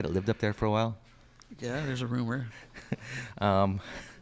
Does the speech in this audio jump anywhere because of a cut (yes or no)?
no